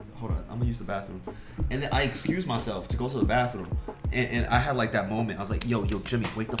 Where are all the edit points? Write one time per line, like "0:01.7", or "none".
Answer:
none